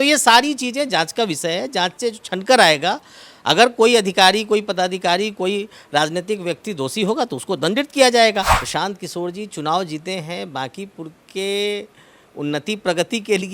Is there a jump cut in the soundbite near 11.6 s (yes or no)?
no